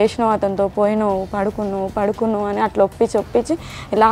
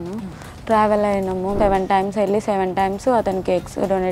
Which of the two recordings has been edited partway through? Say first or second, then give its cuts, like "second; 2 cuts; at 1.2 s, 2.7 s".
second; 1 cut; at 1.6 s